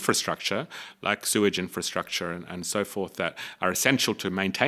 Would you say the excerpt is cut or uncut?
uncut